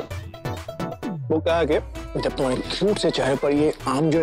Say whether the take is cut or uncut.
uncut